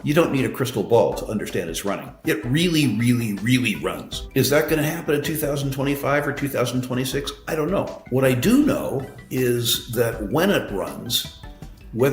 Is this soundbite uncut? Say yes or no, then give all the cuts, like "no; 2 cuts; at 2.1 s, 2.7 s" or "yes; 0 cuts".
no; 1 cut; at 8.0 s